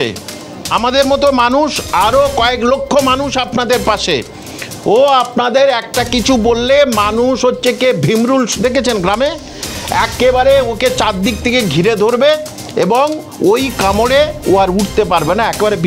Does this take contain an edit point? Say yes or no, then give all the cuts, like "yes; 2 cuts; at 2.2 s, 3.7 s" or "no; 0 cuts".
no; 0 cuts